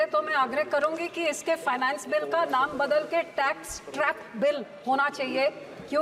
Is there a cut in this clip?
no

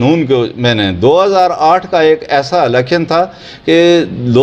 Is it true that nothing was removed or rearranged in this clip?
yes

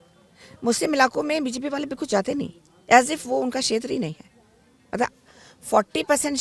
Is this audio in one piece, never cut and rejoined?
yes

